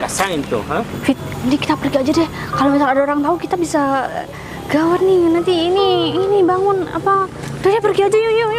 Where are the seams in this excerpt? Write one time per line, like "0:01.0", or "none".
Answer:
0:00.9